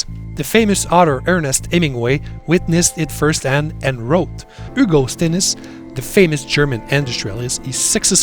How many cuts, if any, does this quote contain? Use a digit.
1